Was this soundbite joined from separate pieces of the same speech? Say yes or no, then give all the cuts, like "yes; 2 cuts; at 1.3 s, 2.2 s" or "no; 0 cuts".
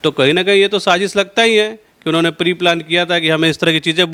no; 0 cuts